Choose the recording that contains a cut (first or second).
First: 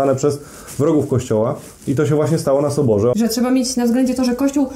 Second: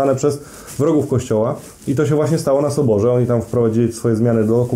first